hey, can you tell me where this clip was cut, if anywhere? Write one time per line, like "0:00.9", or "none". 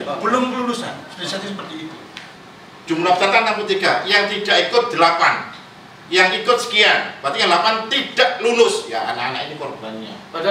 0:02.3